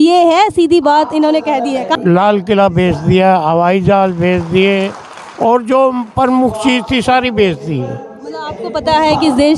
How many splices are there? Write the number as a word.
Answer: one